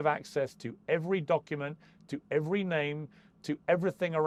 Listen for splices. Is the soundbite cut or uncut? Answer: uncut